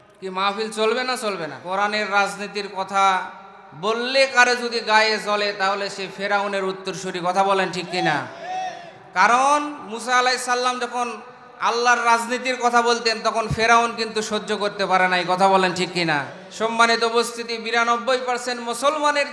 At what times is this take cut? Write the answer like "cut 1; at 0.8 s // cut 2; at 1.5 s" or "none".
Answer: cut 1; at 1.6 s // cut 2; at 16.4 s